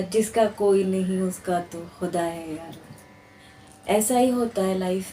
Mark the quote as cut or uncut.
uncut